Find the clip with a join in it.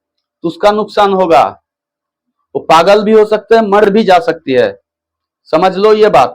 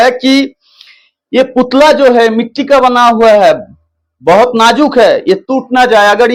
first; 1 cut; at 3.9 s

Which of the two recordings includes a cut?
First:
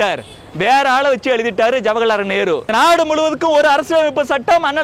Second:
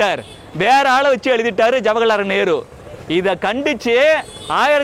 first; 1 cut; at 2.7 s

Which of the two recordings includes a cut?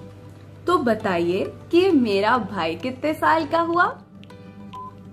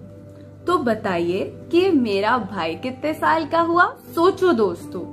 second; 1 cut; at 4.1 s

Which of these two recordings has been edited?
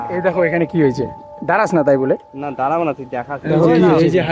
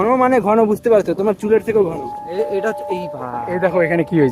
second; 1 cut; at 2.3 s

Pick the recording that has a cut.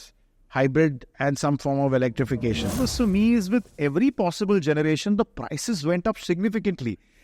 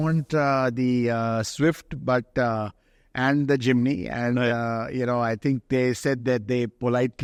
first; 1 cut; at 2.7 s

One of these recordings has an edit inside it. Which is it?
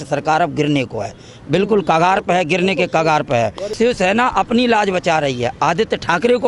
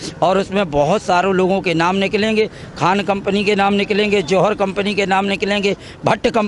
first; 1 cut; at 3.7 s

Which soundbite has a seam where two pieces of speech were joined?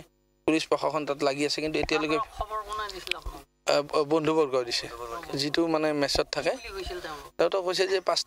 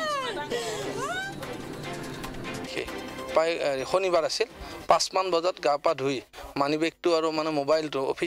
second; 1 cut; at 2.7 s

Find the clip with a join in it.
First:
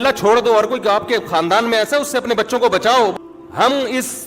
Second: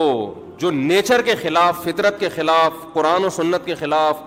first; 1 cut; at 3.1 s

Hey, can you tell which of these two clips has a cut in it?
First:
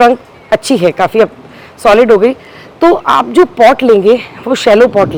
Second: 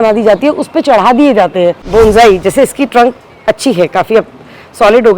second; 1 cut; at 1.8 s

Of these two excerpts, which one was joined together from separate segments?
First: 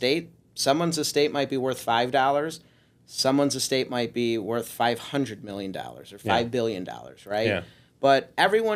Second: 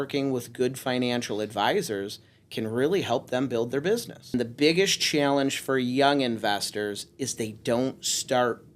second; 1 cut; at 4.3 s

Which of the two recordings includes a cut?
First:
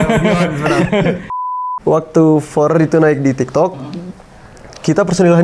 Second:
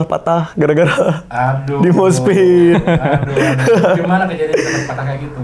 first; 1 cut; at 1.3 s

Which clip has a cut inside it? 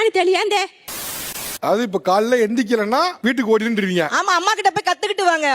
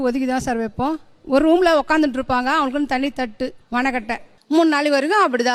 first; 1 cut; at 1.0 s

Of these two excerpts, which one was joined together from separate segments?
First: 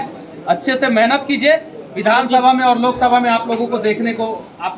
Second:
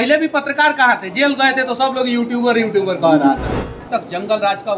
second; 1 cut; at 3.9 s

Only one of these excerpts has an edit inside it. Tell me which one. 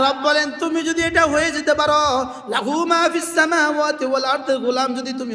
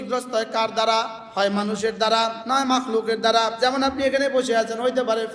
second; 3 cuts; at 1.2 s, 2.4 s, 3.5 s

